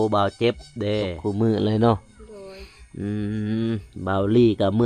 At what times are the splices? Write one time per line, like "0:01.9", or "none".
0:01.2